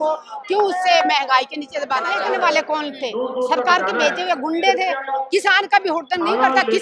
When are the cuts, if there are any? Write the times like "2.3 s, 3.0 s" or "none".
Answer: 2.1 s